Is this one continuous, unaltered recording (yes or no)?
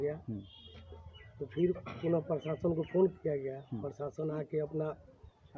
yes